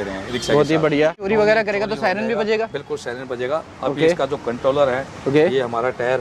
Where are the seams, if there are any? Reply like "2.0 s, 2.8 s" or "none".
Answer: 1.3 s